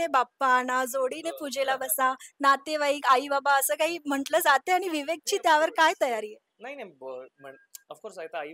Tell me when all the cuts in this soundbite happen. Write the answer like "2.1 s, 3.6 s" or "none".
none